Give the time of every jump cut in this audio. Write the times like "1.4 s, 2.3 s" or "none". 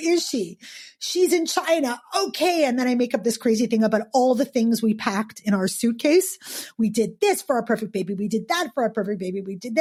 none